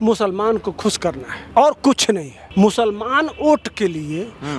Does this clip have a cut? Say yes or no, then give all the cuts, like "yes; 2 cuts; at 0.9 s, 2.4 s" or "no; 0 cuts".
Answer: yes; 2 cuts; at 1.3 s, 2.3 s